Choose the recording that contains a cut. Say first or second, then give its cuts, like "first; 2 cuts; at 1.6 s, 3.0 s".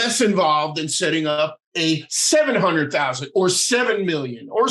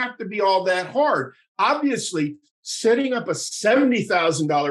first; 1 cut; at 1.6 s